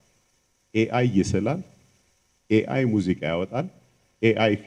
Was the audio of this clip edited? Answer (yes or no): no